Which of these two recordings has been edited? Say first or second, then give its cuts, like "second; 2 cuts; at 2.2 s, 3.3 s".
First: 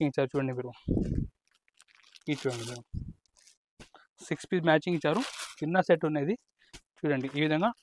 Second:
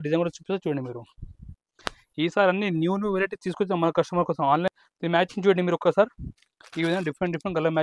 second; 1 cut; at 4.7 s